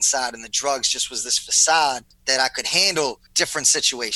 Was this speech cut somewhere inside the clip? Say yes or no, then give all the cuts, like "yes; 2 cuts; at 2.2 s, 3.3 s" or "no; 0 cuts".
yes; 2 cuts; at 2.1 s, 3.2 s